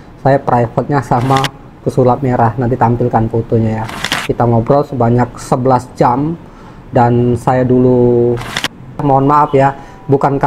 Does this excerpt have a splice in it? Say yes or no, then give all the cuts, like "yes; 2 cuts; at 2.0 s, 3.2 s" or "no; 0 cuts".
yes; 1 cut; at 9.0 s